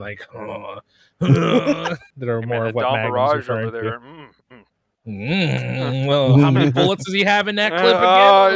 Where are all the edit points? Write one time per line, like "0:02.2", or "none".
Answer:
0:02.0